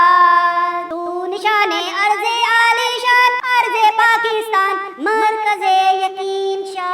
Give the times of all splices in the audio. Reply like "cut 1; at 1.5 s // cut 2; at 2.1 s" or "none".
none